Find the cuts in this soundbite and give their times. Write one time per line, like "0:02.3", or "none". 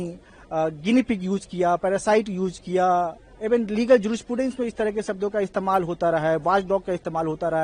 none